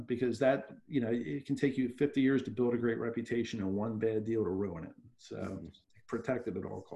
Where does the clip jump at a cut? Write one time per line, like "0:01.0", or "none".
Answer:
none